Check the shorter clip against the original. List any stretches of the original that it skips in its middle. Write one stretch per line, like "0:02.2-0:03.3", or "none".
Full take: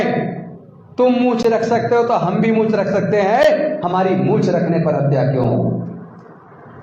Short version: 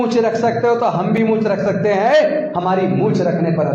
none